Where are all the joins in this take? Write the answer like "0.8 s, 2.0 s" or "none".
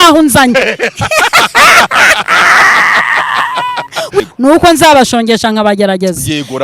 4.2 s